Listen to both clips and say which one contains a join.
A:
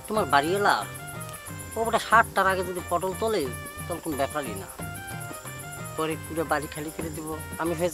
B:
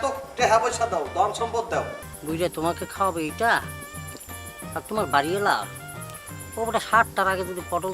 B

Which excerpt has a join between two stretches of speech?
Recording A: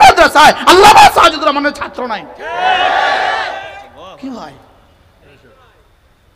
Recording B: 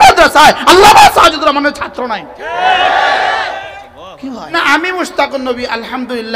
B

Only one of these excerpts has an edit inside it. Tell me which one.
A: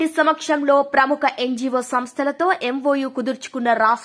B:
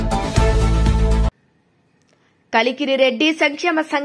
B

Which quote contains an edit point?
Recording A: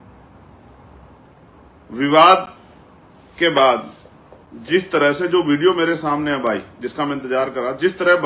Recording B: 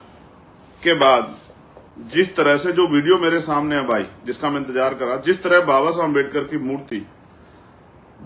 A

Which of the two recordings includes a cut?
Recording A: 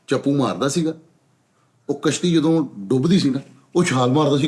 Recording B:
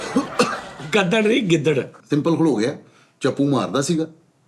B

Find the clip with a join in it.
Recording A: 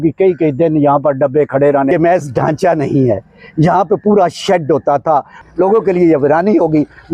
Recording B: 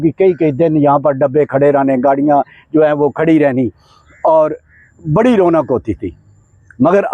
A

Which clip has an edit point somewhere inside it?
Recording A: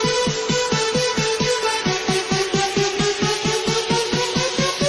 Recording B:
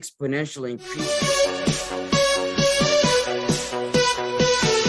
B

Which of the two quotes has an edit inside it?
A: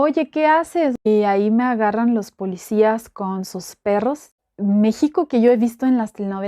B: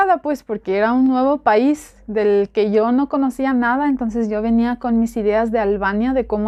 A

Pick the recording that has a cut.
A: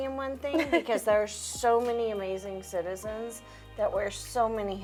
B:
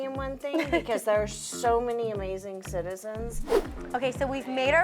B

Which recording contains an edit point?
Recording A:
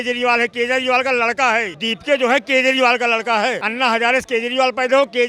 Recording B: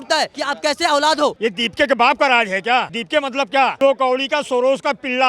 B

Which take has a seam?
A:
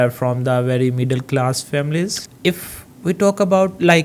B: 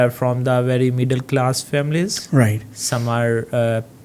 A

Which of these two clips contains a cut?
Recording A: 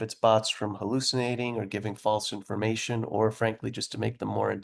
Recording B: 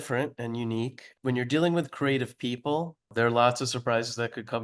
B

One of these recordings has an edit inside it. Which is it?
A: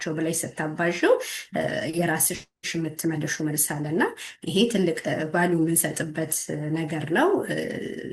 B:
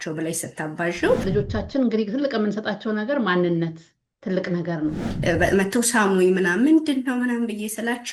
B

